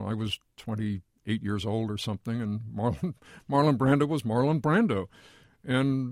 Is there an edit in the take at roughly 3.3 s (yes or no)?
no